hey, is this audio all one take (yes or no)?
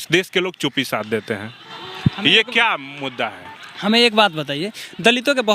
yes